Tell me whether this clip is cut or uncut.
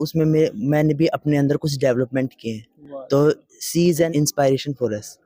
uncut